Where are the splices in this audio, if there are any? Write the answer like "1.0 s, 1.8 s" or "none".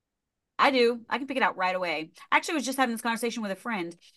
none